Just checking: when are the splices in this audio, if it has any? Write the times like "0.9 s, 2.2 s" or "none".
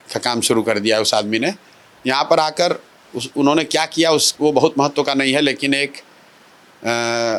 none